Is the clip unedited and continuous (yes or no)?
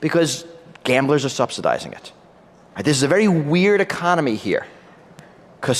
no